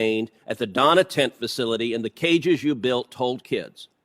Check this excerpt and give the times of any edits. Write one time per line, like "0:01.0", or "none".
none

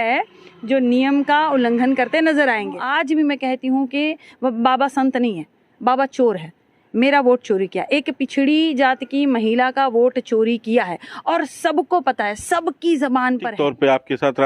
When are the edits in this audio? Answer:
0:02.8
0:13.5

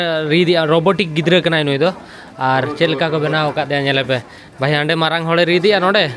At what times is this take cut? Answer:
none

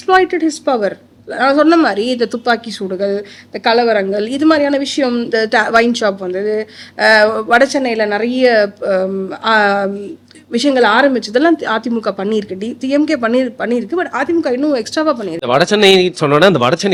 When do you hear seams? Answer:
none

